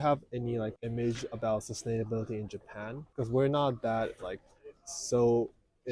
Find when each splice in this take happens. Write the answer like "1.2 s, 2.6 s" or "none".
none